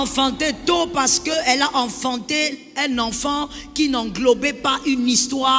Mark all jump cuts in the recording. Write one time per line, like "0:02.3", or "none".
none